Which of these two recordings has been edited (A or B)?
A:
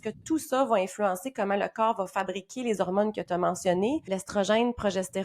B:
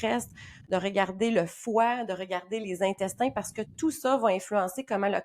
A